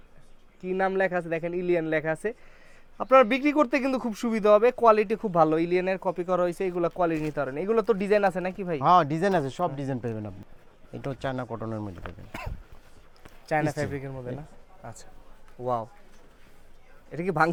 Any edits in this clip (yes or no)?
no